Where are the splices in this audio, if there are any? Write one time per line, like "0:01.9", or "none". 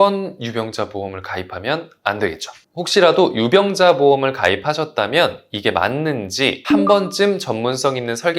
0:06.6